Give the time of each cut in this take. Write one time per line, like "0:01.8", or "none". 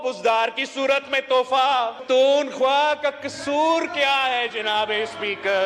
0:02.0